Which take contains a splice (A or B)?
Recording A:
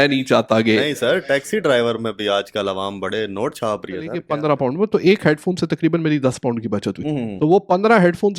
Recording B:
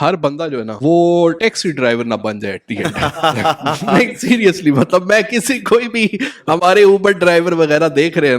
A